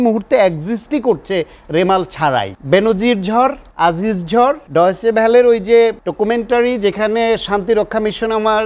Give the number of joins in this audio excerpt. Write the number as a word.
four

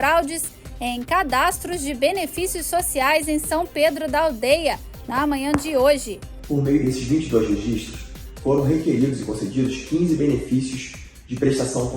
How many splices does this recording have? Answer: one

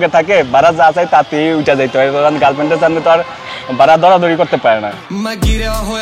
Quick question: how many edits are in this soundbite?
zero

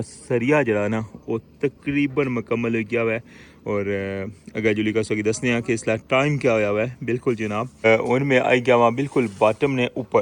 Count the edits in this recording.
one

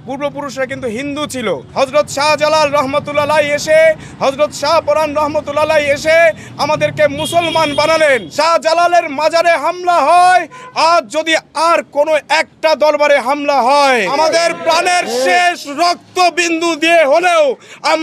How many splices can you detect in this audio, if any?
three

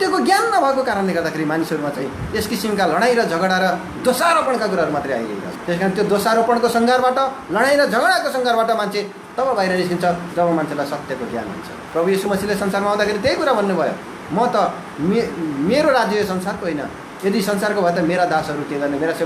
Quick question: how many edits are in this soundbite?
two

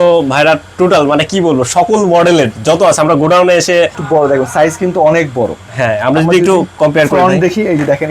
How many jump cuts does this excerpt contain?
one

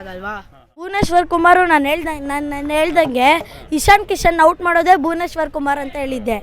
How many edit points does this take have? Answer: one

